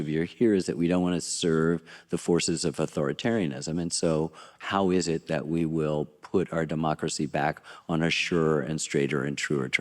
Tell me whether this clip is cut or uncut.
uncut